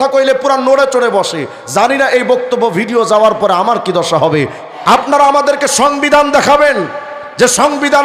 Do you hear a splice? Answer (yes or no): yes